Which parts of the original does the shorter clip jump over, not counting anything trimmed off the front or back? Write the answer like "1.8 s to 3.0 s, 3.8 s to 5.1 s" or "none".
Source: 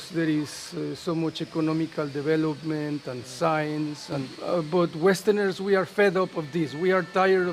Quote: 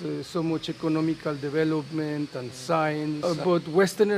3.9 s to 4.5 s